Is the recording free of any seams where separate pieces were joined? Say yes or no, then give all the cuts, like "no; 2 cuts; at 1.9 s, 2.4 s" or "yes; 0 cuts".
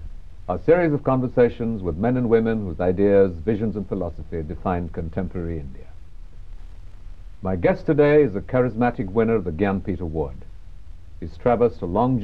yes; 0 cuts